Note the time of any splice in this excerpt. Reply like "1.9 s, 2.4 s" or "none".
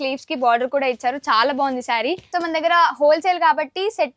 2.2 s